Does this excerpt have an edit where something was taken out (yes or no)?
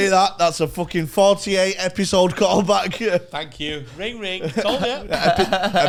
no